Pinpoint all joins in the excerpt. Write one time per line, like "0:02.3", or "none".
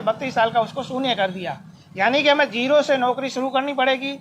none

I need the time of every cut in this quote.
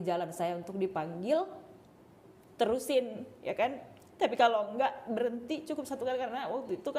none

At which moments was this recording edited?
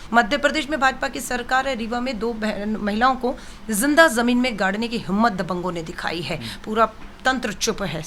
none

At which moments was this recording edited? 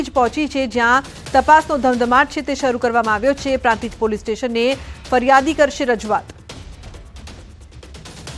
0:03.5

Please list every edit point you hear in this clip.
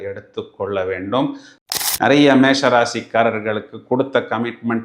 0:01.6

